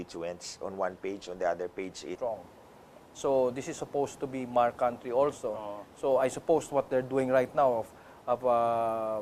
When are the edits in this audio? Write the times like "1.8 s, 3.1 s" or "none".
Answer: none